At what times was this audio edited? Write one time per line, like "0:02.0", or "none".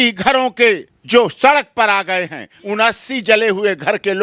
0:00.9
0:02.5